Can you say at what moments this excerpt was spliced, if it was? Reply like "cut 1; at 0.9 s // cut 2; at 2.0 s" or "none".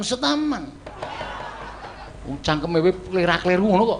cut 1; at 2.1 s